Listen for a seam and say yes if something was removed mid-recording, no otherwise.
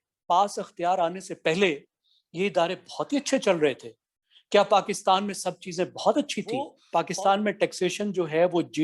yes